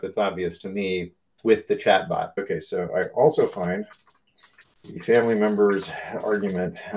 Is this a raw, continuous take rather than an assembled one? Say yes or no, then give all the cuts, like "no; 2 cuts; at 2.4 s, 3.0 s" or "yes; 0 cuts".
no; 2 cuts; at 1.2 s, 2.4 s